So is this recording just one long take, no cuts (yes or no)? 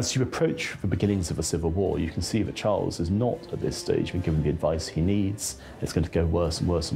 yes